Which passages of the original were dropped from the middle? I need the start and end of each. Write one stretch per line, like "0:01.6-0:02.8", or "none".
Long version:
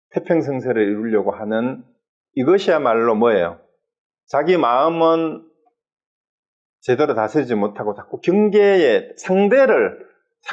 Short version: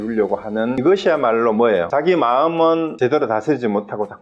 0:01.7-0:02.4
0:03.5-0:04.3
0:05.3-0:06.8